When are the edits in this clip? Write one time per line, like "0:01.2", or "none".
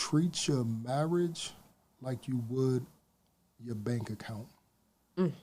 none